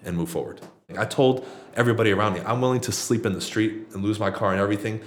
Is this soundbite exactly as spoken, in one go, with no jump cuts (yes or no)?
no